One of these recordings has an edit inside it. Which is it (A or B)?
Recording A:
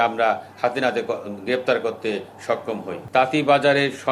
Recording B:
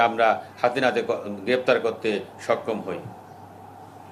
A